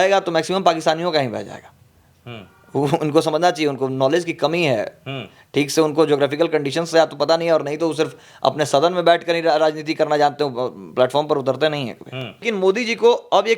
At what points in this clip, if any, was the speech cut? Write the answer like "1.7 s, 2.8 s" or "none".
12.5 s